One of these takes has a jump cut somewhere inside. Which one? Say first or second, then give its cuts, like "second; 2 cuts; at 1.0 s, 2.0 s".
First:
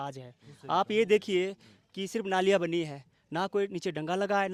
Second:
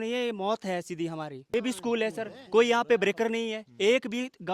second; 1 cut; at 1.5 s